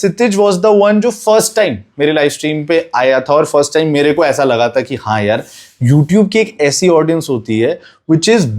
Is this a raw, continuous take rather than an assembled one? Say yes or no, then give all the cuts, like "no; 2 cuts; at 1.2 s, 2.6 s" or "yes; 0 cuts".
yes; 0 cuts